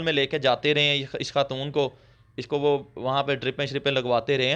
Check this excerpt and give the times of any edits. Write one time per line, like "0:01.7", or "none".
none